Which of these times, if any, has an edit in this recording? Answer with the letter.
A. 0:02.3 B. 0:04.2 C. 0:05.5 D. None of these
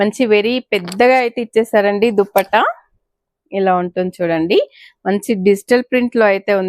D